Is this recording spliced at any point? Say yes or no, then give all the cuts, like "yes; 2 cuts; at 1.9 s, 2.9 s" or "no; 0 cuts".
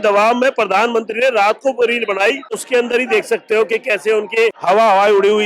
yes; 2 cuts; at 2.6 s, 4.6 s